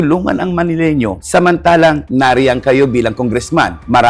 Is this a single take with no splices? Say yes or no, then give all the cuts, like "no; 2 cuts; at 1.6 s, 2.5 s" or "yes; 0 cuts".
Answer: no; 2 cuts; at 1.2 s, 2.0 s